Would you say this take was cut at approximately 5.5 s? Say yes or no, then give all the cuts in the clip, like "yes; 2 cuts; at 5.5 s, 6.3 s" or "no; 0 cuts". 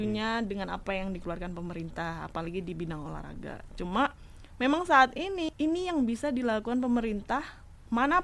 yes; 1 cut; at 5.5 s